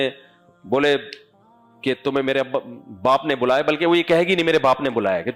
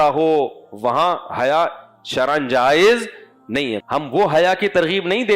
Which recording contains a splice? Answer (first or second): second